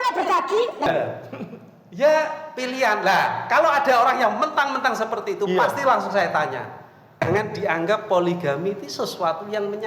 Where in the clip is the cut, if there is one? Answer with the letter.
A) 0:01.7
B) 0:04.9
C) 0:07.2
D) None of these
C